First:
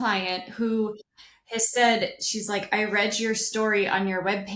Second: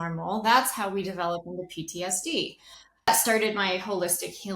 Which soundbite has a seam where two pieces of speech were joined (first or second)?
second